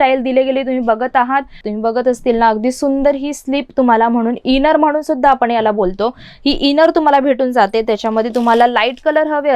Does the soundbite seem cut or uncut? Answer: cut